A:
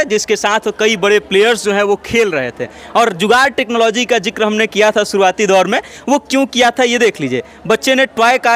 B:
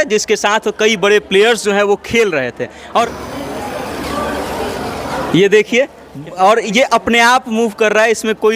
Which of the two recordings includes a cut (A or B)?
B